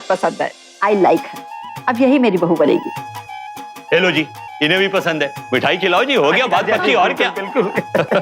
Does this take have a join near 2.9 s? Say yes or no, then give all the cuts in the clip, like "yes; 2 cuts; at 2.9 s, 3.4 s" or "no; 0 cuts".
no; 0 cuts